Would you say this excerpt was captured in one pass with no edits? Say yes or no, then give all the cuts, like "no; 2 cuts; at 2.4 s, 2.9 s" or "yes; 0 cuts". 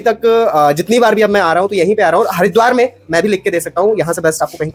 yes; 0 cuts